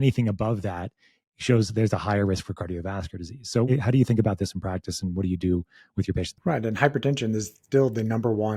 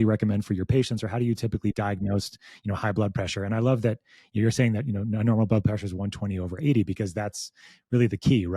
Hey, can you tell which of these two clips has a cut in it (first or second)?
first